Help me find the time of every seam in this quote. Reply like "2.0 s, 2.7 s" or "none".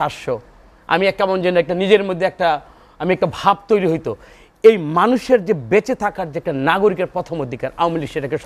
none